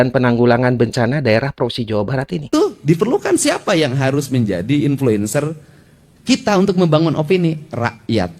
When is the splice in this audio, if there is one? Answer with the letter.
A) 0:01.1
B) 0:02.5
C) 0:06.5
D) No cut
B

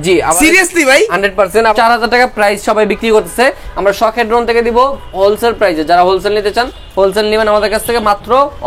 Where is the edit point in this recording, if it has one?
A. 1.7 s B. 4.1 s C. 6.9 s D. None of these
A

